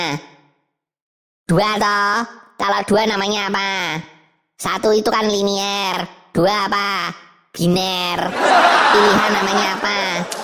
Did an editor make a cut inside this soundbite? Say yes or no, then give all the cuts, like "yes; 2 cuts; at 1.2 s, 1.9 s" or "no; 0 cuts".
no; 0 cuts